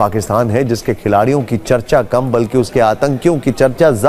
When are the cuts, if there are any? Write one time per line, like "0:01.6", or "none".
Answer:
none

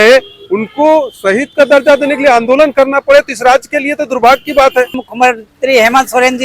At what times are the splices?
0:05.0

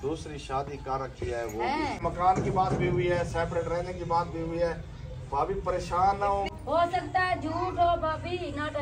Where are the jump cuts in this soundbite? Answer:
0:02.0
0:06.5

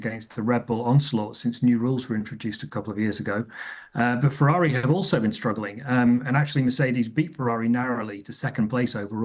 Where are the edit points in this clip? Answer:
0:01.6
0:05.0

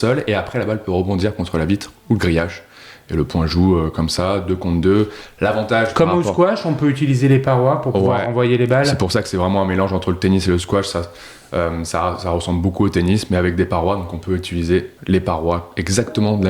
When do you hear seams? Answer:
0:14.9

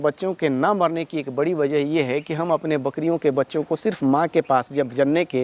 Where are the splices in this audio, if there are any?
none

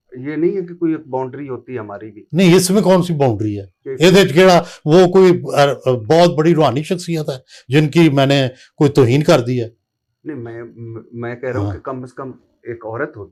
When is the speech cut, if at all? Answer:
none

